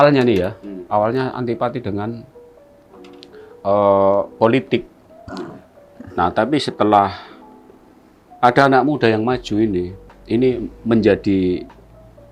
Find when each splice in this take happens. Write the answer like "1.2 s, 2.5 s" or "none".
none